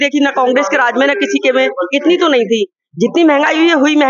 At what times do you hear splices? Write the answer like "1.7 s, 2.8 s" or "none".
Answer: none